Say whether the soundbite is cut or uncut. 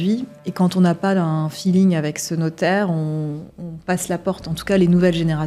uncut